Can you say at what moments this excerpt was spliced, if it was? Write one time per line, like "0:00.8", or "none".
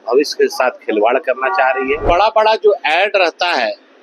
0:02.0